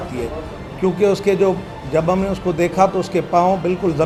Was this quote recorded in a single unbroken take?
yes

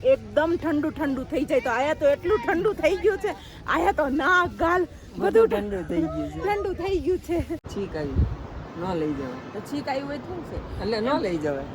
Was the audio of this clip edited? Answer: yes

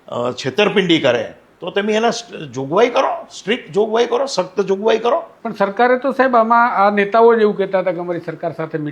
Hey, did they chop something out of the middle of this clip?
yes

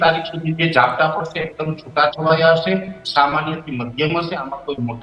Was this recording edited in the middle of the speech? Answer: no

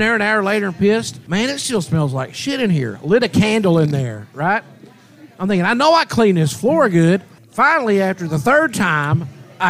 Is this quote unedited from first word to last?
no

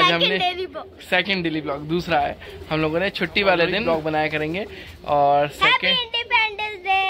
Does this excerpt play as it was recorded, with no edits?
no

